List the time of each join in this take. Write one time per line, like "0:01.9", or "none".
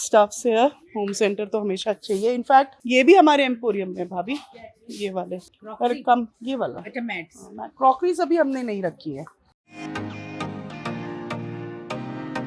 none